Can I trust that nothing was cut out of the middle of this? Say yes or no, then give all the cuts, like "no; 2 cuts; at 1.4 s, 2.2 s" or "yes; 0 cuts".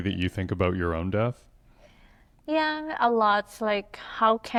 yes; 0 cuts